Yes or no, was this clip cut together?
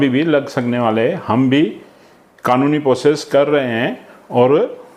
no